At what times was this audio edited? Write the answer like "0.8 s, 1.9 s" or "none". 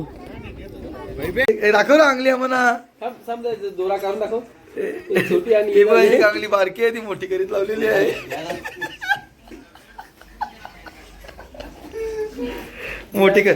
1.5 s